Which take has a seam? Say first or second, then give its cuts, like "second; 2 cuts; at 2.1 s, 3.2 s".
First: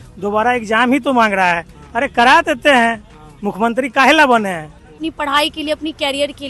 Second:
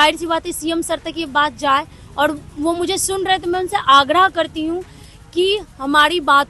first; 1 cut; at 5.0 s